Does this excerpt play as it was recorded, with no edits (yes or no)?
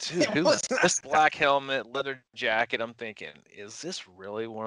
no